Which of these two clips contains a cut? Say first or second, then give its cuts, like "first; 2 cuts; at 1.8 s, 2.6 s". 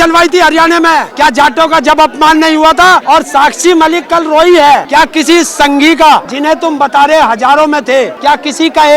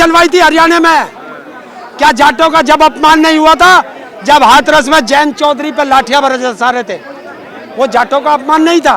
first; 5 cuts; at 1.1 s, 3.0 s, 4.9 s, 6.3 s, 8.1 s